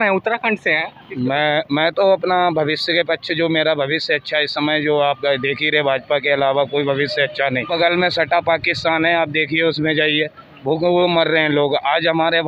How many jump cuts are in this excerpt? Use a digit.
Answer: 1